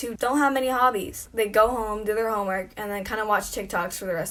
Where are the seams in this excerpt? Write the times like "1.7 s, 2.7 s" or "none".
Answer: none